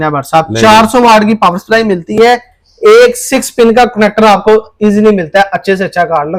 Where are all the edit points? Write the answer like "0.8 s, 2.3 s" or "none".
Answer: none